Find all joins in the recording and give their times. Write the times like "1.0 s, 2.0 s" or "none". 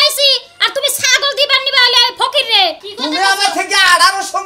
2.8 s